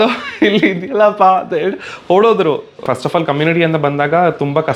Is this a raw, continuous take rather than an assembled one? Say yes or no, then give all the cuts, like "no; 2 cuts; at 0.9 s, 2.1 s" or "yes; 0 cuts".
no; 1 cut; at 2.8 s